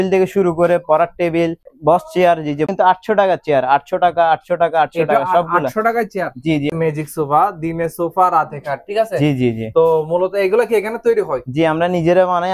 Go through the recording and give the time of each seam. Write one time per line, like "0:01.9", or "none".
0:01.6
0:02.7
0:06.7